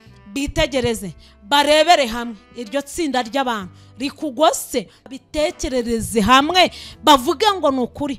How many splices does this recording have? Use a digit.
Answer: 1